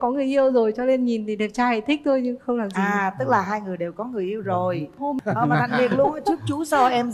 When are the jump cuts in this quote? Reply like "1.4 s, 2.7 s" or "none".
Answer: 5.2 s